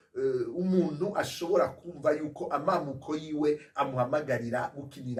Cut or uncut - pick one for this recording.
uncut